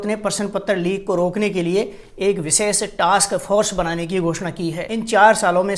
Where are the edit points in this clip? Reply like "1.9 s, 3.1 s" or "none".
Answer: 4.8 s